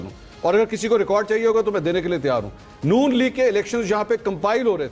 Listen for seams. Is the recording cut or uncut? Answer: uncut